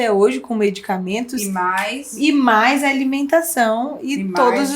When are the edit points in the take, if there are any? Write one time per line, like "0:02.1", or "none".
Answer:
0:02.0

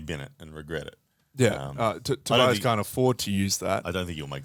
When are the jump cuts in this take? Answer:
none

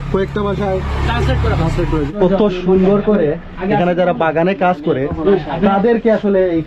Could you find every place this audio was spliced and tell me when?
0:02.1

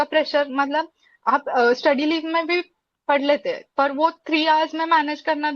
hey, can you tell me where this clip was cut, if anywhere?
none

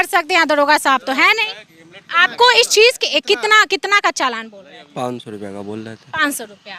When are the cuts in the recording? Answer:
none

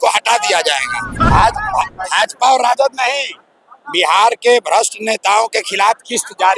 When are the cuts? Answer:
0:01.2

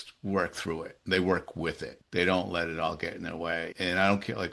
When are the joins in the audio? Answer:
0:01.9
0:03.7

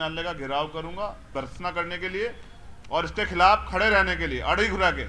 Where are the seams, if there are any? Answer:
0:01.2

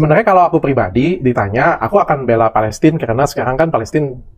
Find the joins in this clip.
none

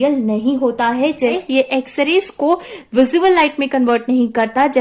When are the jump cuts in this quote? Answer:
0:01.4

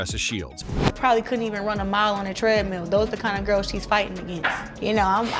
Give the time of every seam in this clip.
0:00.9

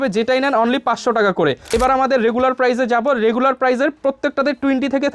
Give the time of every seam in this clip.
0:01.7

